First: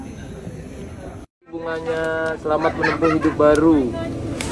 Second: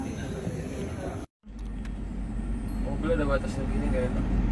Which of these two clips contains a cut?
second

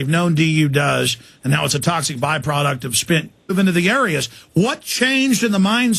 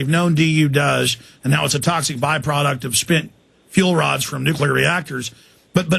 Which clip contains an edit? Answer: second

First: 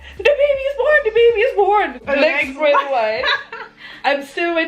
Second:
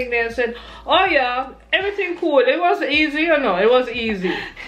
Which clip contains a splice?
first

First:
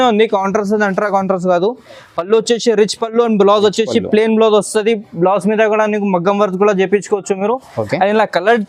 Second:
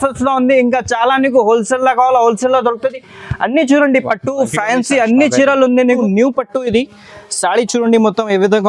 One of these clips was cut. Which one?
second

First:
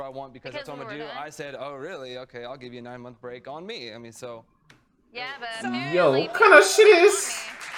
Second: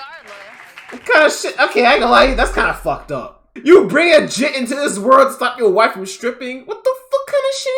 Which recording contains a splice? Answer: second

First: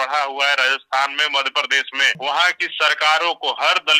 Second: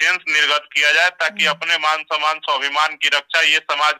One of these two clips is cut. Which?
first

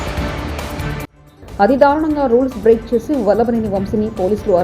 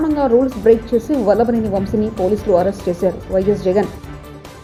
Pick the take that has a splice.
first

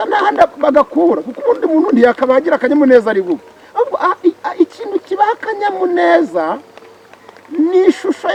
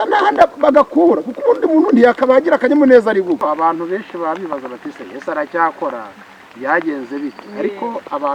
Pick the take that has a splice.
second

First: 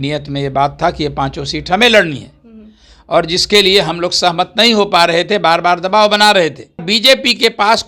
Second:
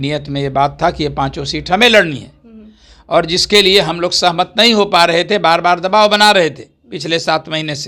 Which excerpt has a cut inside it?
first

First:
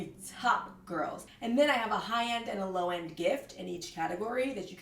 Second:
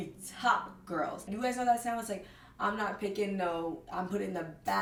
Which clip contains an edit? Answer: first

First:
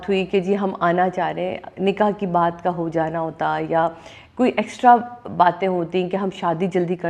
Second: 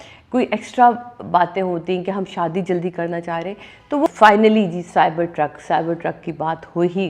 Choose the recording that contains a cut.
second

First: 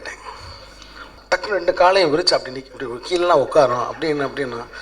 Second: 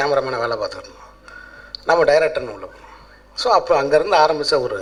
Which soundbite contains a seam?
first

